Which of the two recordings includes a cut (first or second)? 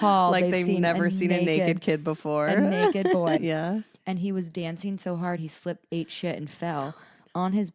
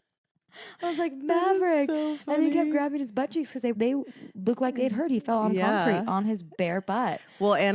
first